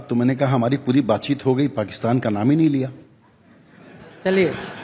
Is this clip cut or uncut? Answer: uncut